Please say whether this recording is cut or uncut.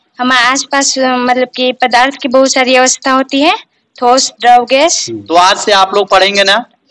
cut